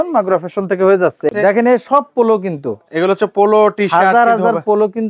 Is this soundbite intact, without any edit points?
no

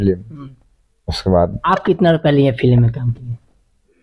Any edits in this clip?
yes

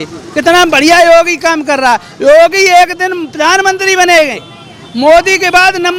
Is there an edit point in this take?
no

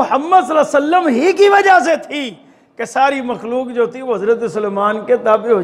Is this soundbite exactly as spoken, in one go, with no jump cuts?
yes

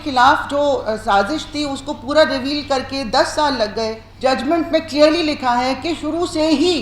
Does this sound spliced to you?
yes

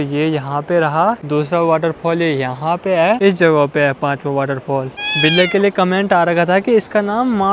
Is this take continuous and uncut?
no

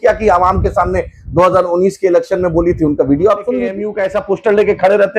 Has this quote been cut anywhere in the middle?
yes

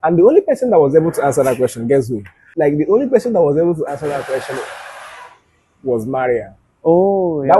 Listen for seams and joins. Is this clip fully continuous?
no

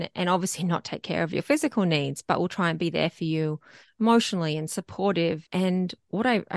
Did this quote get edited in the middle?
yes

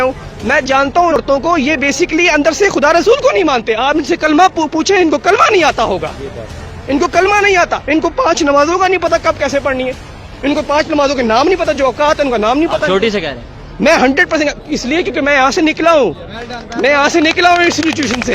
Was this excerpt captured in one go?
no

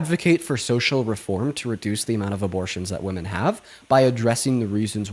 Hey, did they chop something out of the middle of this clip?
no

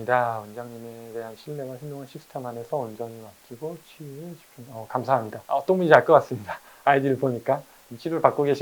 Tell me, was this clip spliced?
no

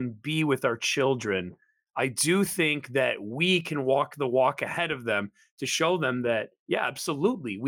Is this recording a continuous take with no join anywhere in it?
yes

